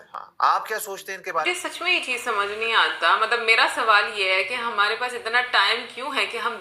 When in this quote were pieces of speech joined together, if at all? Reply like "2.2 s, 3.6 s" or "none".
1.5 s